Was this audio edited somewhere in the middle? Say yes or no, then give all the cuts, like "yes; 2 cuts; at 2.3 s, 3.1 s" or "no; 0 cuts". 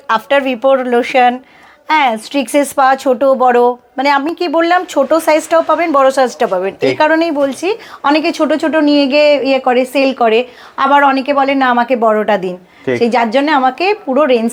no; 0 cuts